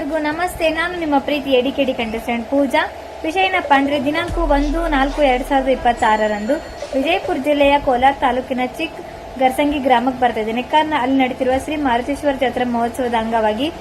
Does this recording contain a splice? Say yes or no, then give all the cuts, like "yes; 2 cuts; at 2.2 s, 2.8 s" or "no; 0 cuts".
no; 0 cuts